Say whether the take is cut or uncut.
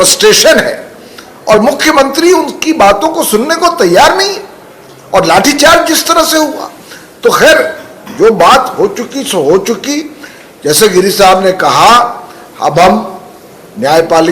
uncut